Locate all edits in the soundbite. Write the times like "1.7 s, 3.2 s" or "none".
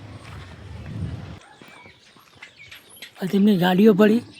1.4 s, 3.1 s